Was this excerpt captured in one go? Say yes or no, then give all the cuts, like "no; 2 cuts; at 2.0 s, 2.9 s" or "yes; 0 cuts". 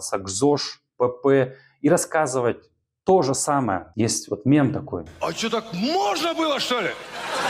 no; 1 cut; at 3.9 s